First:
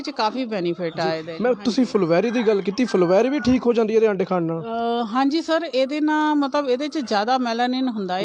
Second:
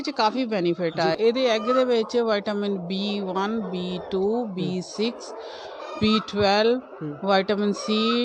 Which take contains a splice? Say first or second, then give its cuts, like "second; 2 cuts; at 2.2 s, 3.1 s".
second; 1 cut; at 1.2 s